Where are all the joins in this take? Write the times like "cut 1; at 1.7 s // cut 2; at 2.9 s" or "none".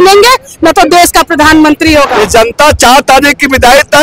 cut 1; at 2.2 s